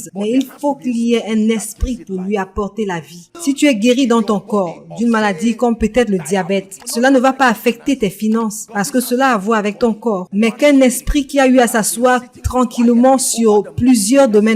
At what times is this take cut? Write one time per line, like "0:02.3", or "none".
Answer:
0:03.2
0:06.8
0:08.6
0:10.2